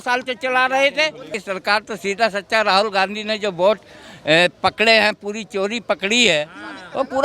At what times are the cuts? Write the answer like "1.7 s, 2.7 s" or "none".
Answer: 1.4 s